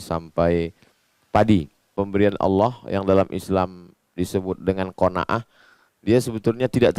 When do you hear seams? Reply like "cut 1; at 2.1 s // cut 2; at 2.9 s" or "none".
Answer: cut 1; at 1.9 s

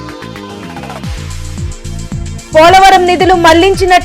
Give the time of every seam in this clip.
cut 1; at 2.3 s

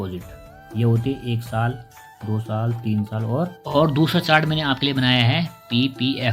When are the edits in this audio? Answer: cut 1; at 3.6 s

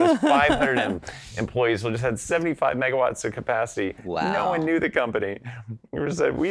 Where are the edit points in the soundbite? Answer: none

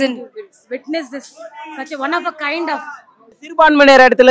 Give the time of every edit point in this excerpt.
cut 1; at 3.4 s

